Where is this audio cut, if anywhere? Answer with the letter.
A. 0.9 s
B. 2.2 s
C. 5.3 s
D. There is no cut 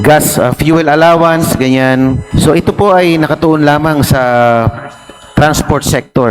B